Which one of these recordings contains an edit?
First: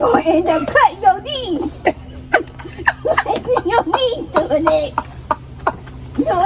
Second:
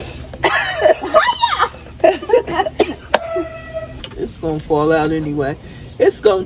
second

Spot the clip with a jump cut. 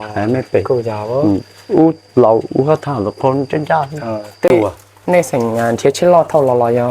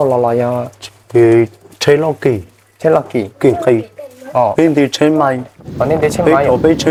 first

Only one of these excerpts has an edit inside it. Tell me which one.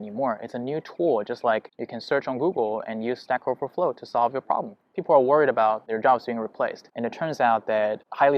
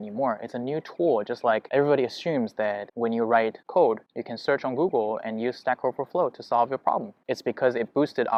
first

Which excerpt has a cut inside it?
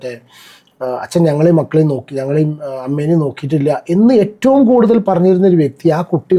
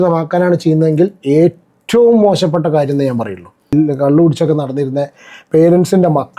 second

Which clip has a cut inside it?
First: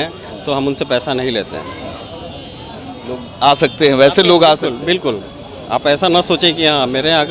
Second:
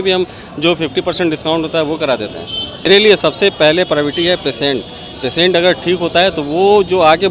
second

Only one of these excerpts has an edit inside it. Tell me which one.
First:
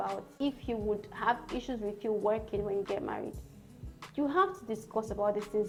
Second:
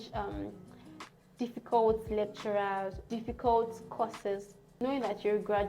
second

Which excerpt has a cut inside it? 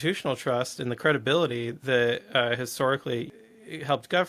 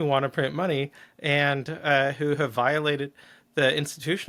first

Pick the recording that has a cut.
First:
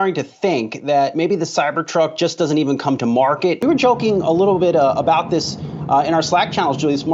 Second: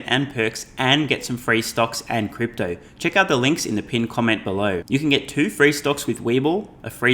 first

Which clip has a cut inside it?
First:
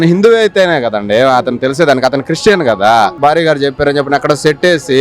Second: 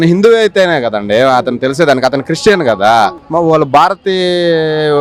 first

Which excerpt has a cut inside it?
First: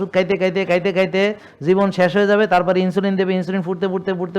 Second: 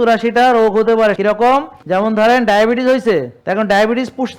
second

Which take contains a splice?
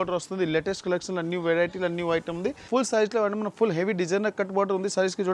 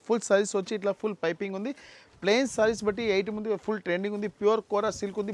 first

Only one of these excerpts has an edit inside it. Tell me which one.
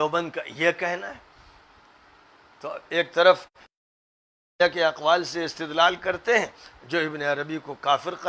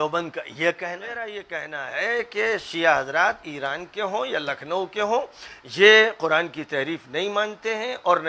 second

